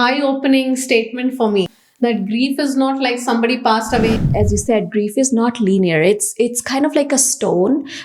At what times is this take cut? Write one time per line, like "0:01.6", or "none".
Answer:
0:01.8
0:04.1